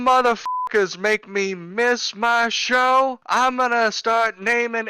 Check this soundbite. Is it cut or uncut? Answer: uncut